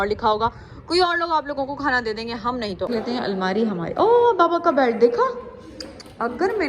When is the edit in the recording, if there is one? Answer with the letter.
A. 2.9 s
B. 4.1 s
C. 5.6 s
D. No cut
A